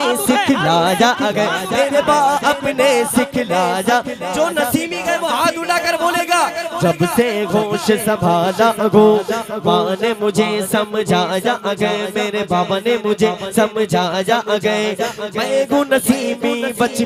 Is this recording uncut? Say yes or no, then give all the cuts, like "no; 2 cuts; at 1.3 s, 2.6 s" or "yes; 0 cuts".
yes; 0 cuts